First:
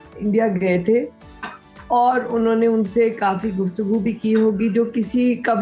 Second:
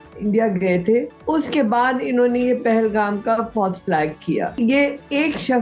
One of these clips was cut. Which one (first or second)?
second